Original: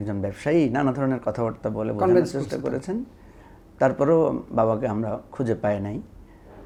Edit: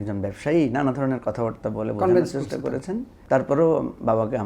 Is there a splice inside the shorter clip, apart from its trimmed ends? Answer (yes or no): yes